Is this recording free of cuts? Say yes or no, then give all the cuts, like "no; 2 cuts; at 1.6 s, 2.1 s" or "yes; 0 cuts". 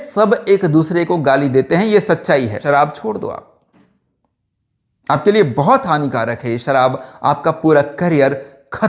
no; 1 cut; at 2.6 s